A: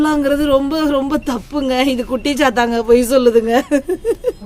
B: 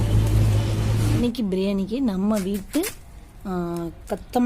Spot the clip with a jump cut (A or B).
B